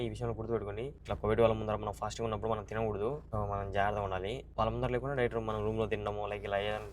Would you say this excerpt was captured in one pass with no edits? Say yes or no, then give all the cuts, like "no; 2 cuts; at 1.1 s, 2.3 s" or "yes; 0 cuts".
no; 3 cuts; at 1.0 s, 3.2 s, 4.4 s